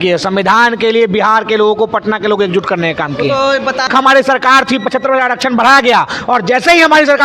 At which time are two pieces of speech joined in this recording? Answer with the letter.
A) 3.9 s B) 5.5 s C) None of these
A